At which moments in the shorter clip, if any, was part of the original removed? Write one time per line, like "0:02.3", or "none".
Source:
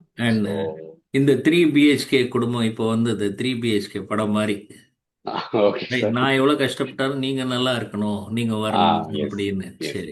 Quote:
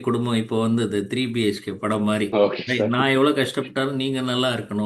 0:02.3